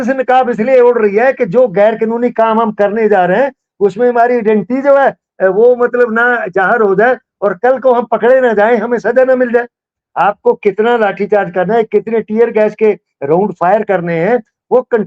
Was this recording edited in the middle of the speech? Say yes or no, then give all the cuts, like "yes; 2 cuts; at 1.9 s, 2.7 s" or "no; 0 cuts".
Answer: yes; 1 cut; at 10.0 s